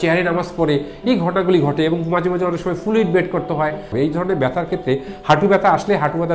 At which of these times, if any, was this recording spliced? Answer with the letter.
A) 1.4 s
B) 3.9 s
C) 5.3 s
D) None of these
B